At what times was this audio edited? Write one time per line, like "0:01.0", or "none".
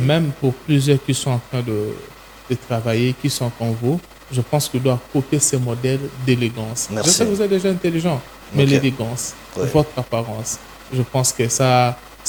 none